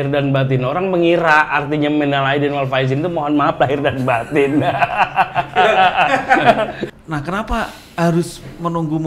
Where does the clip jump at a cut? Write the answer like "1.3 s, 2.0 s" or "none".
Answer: 6.8 s